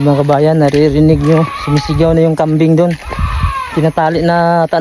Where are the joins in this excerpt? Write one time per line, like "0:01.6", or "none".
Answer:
none